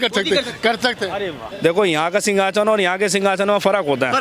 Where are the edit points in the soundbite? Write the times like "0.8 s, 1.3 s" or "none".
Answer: 1.4 s